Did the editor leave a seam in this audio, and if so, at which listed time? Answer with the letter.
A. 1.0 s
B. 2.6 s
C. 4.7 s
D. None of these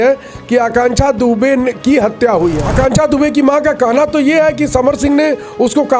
B